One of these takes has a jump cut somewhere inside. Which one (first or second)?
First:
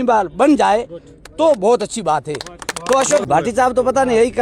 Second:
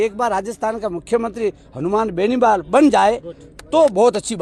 first